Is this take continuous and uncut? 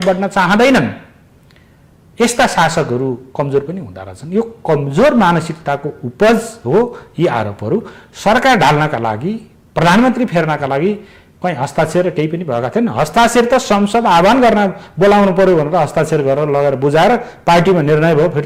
yes; 0 cuts

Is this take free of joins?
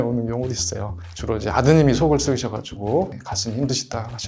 no; 1 cut; at 1.0 s

